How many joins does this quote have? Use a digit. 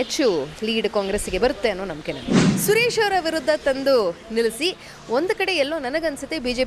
1